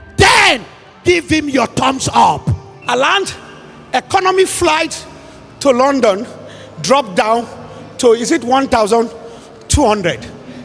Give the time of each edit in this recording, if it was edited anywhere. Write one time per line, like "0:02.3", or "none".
0:02.7